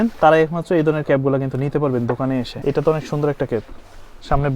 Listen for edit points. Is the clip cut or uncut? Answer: cut